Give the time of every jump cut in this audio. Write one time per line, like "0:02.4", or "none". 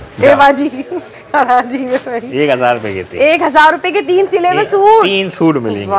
none